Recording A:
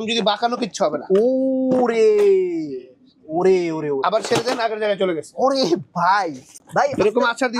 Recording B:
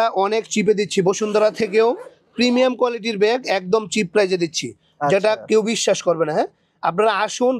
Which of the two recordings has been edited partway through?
A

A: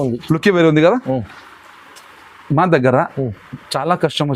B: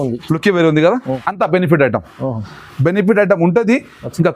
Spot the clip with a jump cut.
B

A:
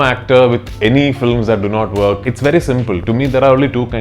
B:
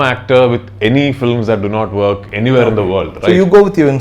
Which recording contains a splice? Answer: A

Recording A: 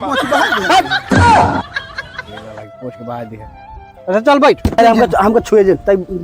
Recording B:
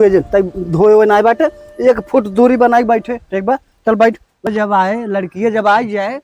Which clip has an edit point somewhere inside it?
B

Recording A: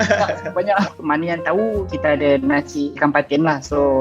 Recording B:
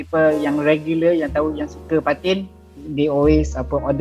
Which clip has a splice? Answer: A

